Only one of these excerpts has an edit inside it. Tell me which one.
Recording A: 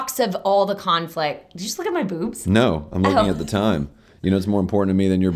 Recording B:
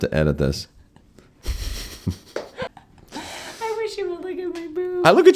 B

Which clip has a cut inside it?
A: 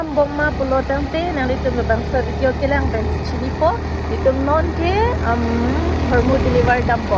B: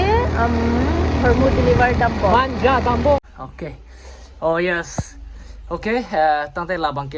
B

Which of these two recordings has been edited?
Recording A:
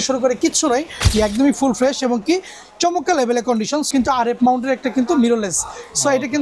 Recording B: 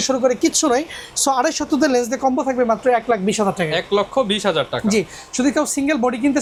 A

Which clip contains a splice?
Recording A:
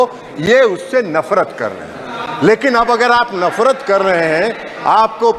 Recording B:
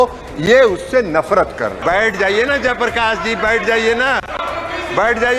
B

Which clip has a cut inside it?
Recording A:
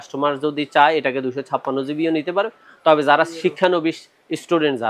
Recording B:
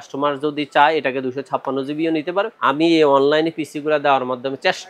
B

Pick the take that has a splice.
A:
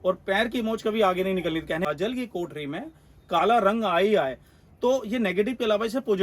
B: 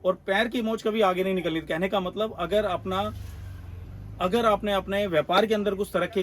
A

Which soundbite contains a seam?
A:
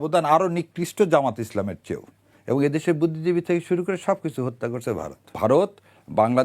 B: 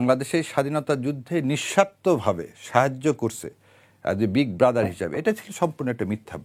A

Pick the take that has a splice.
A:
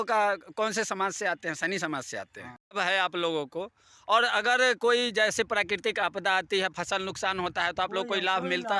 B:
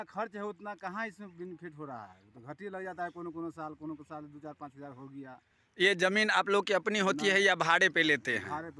A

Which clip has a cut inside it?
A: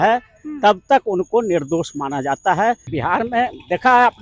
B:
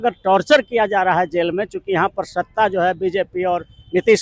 A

